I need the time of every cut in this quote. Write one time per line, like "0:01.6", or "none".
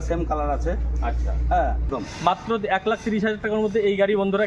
0:01.9